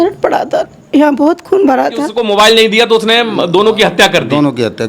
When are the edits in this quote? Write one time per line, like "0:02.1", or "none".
0:02.1